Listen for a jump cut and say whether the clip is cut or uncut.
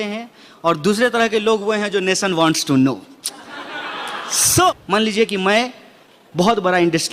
cut